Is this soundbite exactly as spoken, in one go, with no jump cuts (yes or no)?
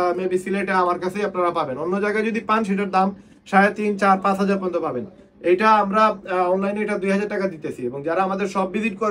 yes